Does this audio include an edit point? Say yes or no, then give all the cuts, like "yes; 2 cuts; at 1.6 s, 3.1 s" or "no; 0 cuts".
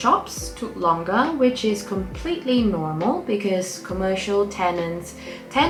no; 0 cuts